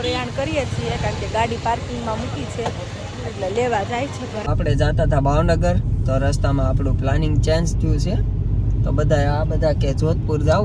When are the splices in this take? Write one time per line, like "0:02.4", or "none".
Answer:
0:04.4